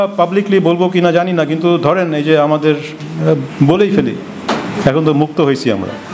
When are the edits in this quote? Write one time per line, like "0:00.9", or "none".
none